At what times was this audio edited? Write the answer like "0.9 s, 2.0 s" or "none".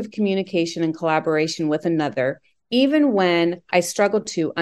none